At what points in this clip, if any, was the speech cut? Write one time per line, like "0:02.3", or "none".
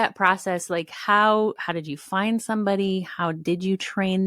none

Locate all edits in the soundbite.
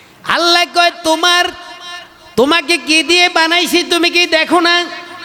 none

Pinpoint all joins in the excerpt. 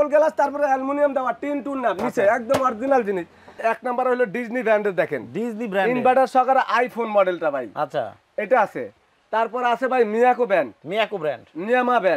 0:03.6

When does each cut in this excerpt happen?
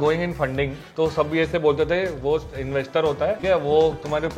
0:03.4

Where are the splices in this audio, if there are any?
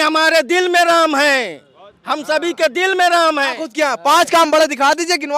0:03.6

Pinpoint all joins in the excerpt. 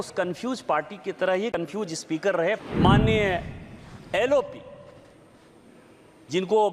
0:02.6

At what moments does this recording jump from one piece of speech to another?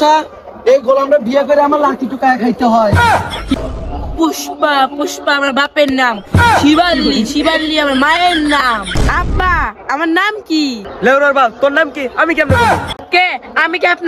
0:03.5
0:08.9

